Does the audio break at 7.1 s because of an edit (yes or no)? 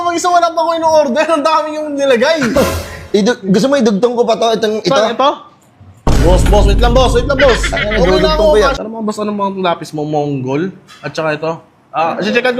no